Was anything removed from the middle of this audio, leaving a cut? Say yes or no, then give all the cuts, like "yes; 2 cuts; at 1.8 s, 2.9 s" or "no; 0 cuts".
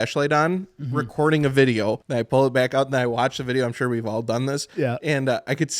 yes; 1 cut; at 2.0 s